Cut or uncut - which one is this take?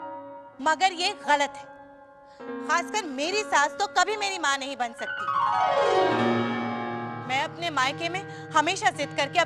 cut